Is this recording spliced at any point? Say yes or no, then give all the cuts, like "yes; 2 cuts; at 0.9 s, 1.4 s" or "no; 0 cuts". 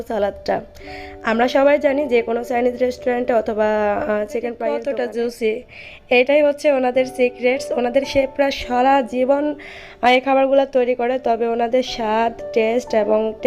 yes; 1 cut; at 4.6 s